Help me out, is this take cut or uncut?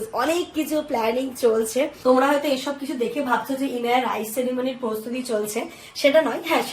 cut